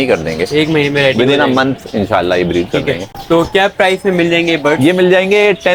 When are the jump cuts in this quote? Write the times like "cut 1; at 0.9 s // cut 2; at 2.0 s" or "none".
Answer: none